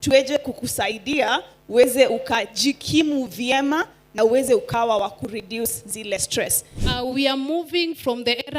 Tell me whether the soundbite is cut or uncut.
cut